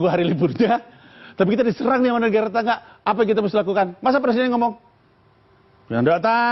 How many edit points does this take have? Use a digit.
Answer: 0